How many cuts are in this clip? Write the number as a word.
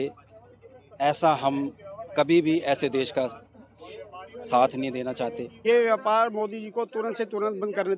one